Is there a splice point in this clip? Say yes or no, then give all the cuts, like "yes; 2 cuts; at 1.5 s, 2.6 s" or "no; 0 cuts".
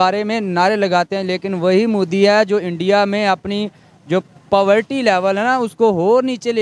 no; 0 cuts